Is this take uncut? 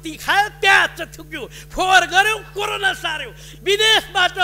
no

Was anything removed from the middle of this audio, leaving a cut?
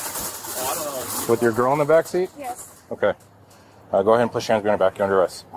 no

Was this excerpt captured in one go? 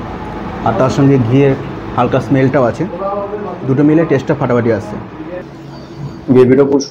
no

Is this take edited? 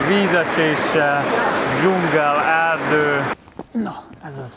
yes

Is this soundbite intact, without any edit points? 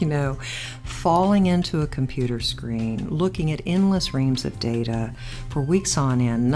yes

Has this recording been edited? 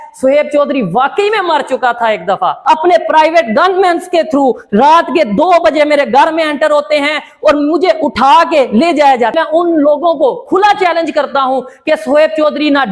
yes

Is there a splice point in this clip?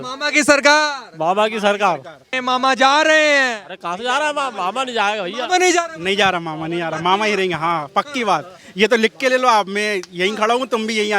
yes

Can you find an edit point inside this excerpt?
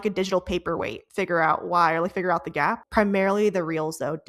yes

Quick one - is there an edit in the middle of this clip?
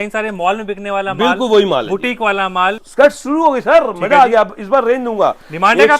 yes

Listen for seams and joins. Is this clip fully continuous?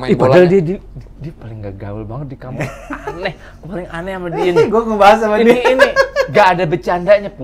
yes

